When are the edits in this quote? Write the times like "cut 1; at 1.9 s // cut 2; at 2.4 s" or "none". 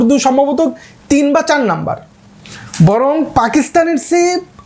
none